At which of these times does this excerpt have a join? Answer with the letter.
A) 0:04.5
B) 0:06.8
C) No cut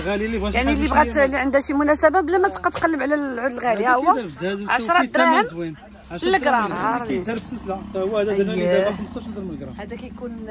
B